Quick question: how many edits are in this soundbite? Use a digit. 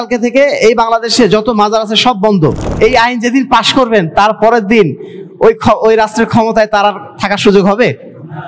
1